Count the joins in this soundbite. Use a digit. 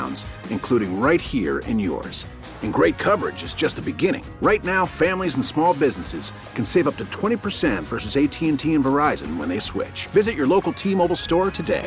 0